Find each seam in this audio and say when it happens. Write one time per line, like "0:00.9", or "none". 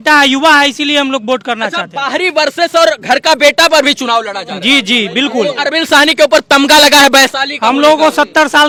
none